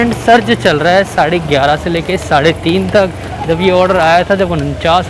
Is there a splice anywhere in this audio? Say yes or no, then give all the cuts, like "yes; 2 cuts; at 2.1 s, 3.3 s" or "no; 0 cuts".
no; 0 cuts